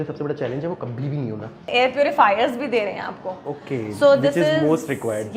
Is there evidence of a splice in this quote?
yes; 1 cut; at 1.6 s

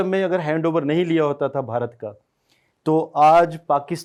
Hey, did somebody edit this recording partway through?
no; 0 cuts

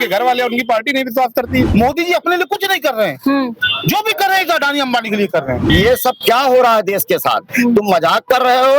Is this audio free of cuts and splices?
no; 2 cuts; at 1.7 s, 5.6 s

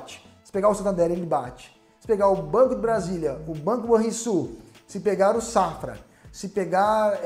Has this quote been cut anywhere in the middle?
no; 0 cuts

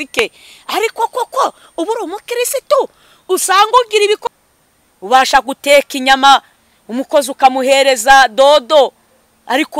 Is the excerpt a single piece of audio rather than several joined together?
no; 1 cut; at 4.2 s

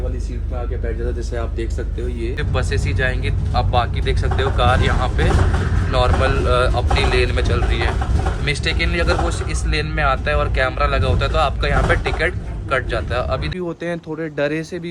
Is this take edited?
yes; 2 cuts; at 2.4 s, 13.5 s

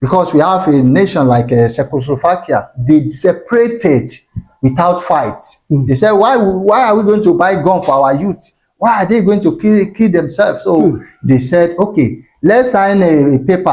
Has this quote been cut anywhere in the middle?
no; 0 cuts

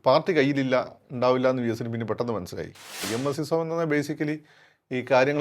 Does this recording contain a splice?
yes; 1 cut; at 3.0 s

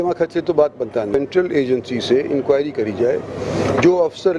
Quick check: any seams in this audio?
yes; 1 cut; at 1.2 s

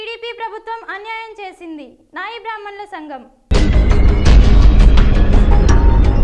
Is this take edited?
no; 0 cuts

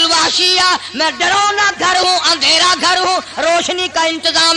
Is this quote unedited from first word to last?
yes; 0 cuts

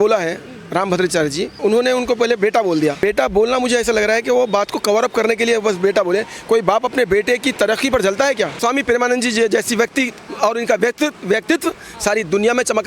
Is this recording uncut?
no; 3 cuts; at 1.6 s, 3.0 s, 8.6 s

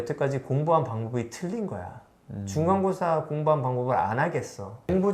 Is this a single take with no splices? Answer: yes; 0 cuts

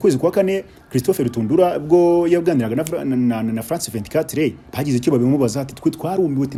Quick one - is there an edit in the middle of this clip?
no; 0 cuts

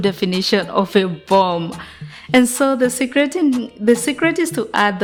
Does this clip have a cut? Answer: no; 0 cuts

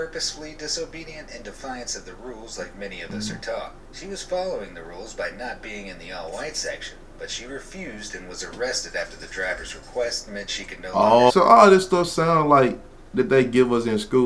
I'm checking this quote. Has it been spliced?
yes; 1 cut; at 11.3 s

